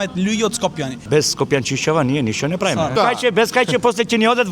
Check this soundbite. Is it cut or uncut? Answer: cut